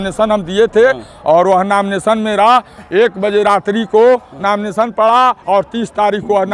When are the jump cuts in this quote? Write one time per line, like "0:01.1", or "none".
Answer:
none